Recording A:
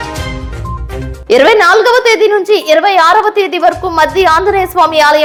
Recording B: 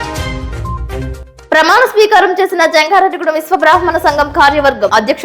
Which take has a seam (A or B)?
B